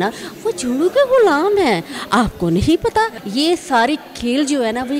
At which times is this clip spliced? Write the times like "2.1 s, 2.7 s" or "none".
3.2 s